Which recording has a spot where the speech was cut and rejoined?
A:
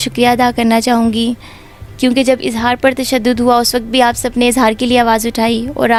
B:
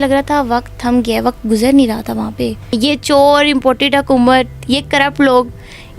B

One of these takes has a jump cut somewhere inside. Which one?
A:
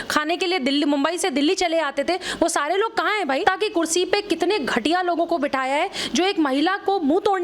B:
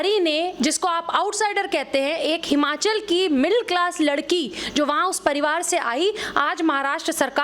A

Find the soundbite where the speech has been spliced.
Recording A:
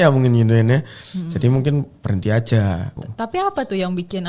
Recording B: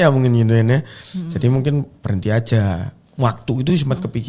A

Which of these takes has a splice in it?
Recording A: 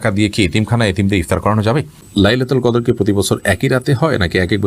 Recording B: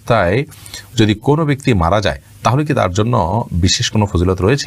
A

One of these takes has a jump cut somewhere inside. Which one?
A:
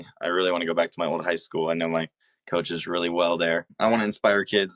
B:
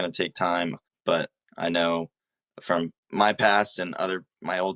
A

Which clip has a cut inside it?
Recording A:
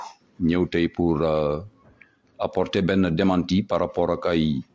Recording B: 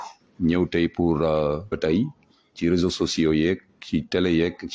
B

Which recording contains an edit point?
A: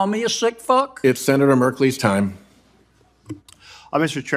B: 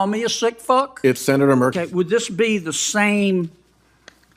B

